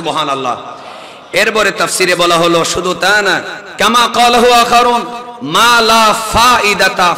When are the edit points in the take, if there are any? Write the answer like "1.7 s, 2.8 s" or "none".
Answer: 3.6 s